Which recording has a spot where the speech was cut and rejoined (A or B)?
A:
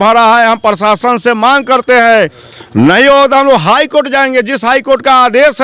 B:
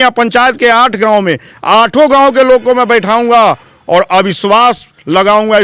A